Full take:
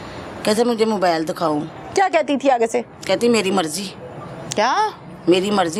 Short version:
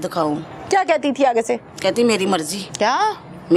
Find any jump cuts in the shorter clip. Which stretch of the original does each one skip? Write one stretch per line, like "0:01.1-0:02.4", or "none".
0:03.8-0:04.4